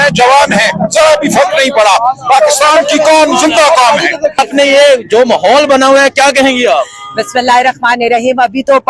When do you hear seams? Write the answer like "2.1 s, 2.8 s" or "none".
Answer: 4.4 s